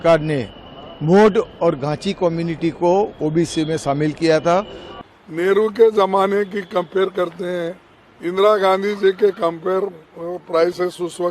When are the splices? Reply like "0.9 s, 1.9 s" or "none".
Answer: 4.9 s